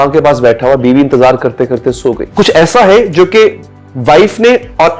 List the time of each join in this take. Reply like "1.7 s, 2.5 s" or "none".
2.2 s